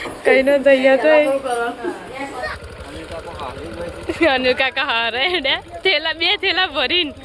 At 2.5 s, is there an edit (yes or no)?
yes